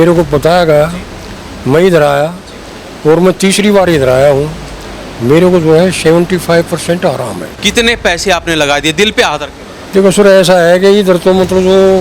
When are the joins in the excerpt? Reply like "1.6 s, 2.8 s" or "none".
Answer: 7.5 s